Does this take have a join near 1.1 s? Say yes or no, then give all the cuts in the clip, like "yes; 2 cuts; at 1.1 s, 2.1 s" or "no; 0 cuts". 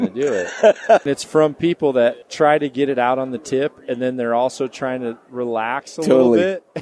yes; 2 cuts; at 1.1 s, 2.2 s